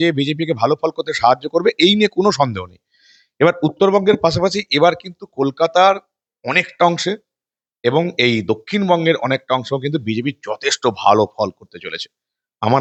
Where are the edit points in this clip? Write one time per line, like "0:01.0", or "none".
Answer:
none